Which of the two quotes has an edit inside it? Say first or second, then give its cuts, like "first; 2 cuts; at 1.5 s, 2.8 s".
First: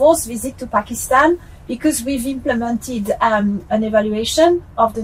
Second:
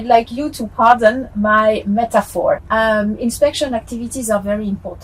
second; 1 cut; at 2.6 s